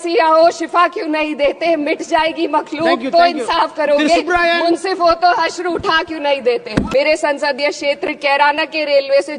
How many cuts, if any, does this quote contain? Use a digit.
1